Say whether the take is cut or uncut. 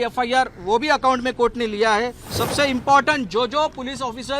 cut